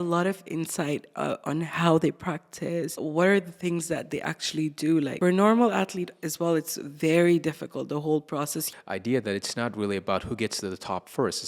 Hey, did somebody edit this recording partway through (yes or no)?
yes